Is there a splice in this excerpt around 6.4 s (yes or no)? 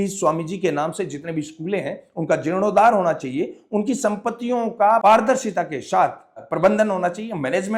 yes